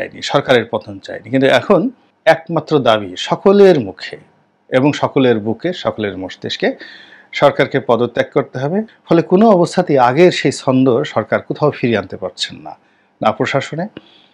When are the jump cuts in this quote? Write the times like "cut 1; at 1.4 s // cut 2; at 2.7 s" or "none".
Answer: cut 1; at 8.9 s